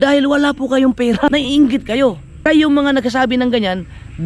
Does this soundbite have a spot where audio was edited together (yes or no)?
yes